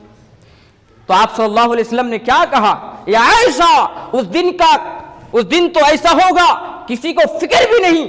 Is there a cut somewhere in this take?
no; 0 cuts

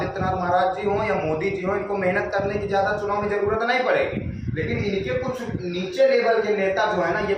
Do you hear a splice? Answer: no; 0 cuts

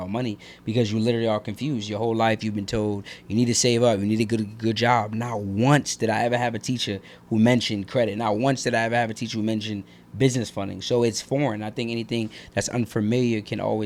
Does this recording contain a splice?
no; 0 cuts

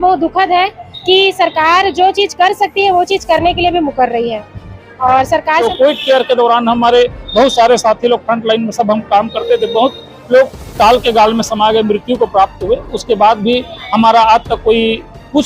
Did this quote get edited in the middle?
yes; 1 cut; at 5.6 s

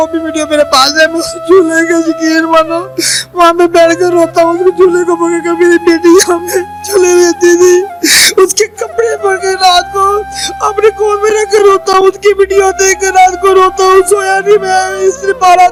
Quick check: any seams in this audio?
no; 0 cuts

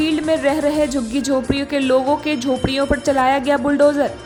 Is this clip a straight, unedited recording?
yes; 0 cuts

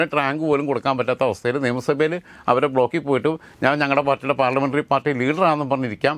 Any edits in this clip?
no; 0 cuts

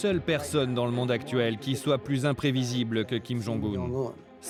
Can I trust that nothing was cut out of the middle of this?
yes; 0 cuts

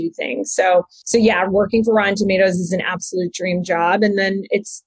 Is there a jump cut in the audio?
yes; 1 cut; at 1.0 s

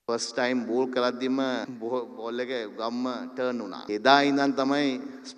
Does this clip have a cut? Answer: yes; 2 cuts; at 1.7 s, 3.9 s

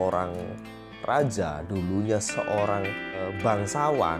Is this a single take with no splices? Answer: no; 1 cut; at 3.3 s

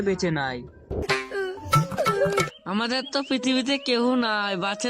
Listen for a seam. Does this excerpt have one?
yes; 2 cuts; at 1.0 s, 2.5 s

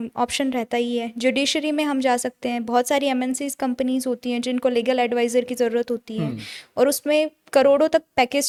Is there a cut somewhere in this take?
no; 0 cuts

